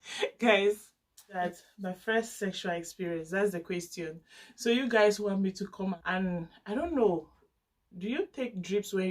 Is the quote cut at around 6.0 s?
yes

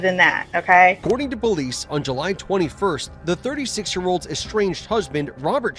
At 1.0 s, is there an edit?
yes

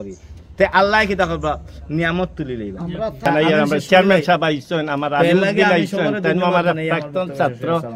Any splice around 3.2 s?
yes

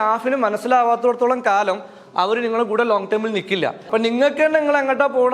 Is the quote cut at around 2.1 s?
no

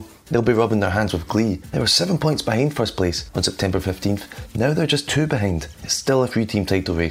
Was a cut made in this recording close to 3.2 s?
yes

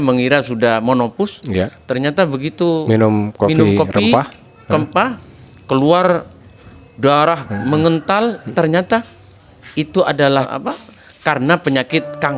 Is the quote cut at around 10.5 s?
yes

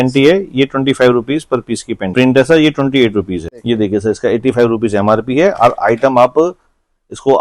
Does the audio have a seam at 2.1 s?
yes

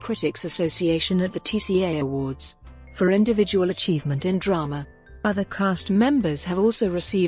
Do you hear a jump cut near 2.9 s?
no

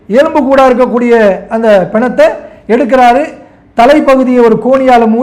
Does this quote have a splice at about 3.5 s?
no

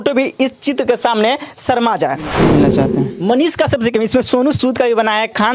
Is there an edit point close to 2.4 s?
yes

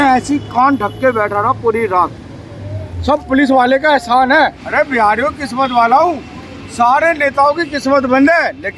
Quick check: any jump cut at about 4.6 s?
yes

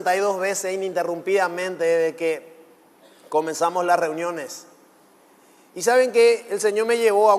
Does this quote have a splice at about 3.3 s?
yes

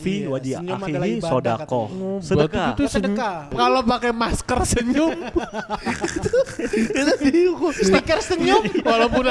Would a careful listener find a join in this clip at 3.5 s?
yes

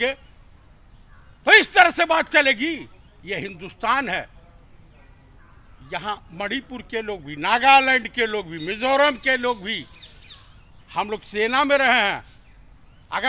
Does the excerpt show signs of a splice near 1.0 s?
no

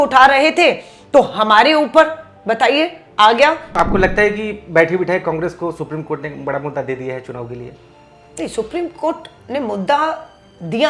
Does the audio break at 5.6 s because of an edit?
no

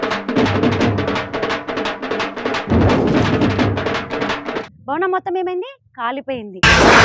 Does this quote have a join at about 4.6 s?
yes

